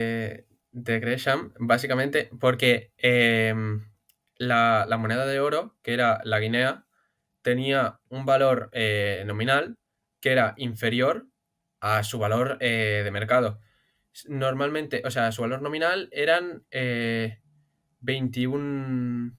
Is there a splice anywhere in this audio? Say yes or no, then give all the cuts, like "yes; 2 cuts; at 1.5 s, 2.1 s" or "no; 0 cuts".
no; 0 cuts